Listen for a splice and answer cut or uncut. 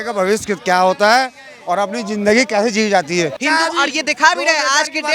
cut